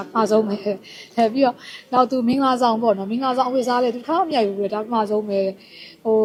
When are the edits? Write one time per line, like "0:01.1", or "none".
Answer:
none

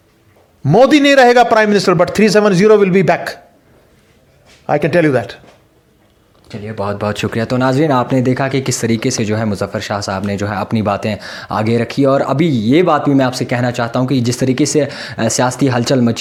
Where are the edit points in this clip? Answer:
none

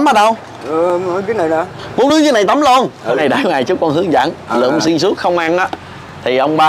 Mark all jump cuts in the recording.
0:03.2

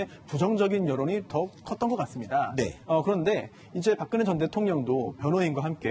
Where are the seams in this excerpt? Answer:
none

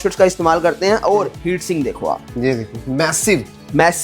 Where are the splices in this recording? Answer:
0:01.4

